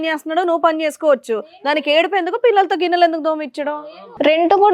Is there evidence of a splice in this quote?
yes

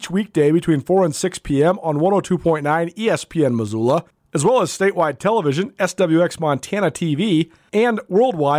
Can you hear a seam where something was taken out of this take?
yes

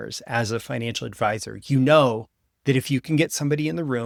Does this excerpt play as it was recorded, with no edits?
yes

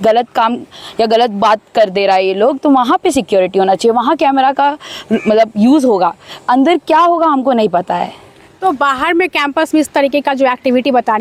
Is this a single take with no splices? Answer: yes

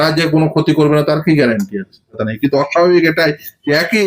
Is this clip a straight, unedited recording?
no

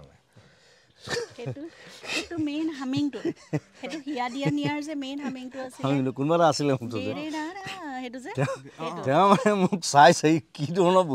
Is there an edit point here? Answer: no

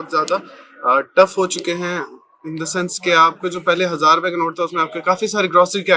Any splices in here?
no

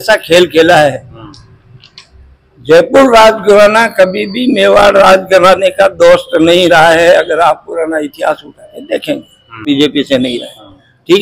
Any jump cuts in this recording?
yes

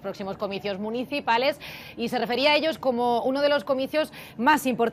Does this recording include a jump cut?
yes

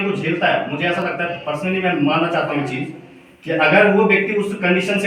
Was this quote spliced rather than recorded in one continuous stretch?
no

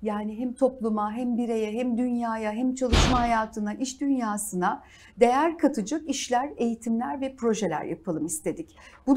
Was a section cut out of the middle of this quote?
no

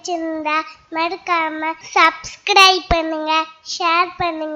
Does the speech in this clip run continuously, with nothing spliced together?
no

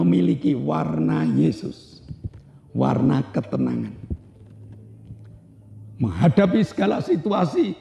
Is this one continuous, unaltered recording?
yes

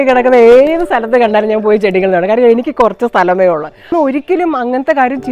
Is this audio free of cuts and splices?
no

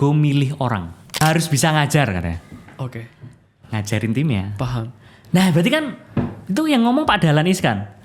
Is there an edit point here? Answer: yes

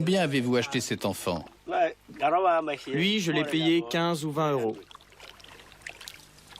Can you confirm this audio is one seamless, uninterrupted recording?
no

